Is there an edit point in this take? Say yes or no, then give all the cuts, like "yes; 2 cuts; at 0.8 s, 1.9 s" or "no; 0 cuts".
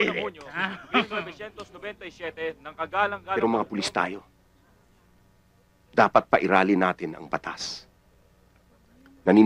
yes; 1 cut; at 3.4 s